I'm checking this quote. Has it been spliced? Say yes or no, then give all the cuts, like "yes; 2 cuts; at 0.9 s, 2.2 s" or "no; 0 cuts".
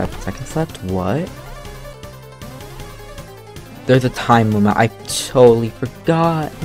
no; 0 cuts